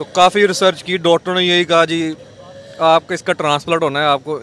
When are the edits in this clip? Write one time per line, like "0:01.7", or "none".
none